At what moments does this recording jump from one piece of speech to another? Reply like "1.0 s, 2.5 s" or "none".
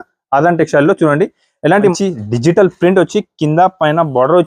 1.9 s